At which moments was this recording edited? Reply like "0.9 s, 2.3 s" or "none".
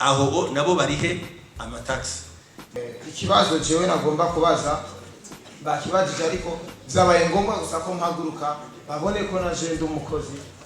2.8 s